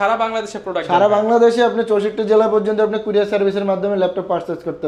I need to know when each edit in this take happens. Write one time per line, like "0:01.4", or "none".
none